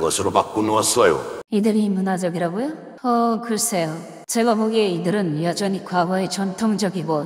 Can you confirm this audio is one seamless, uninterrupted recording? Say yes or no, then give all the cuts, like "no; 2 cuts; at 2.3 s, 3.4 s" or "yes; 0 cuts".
no; 1 cut; at 1.4 s